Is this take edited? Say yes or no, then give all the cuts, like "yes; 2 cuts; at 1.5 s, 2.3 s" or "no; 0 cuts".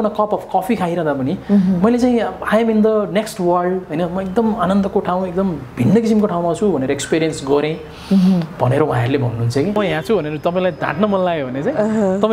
yes; 1 cut; at 9.7 s